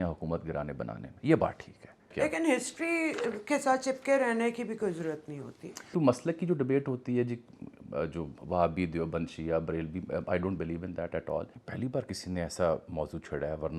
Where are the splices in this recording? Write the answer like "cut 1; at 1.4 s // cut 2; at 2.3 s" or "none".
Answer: cut 1; at 2.1 s // cut 2; at 5.9 s // cut 3; at 11.6 s